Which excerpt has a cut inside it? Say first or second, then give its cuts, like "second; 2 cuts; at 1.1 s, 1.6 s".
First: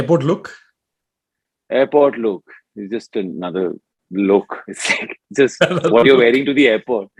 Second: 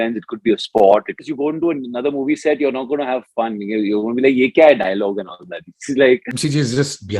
second; 2 cuts; at 1.2 s, 6.3 s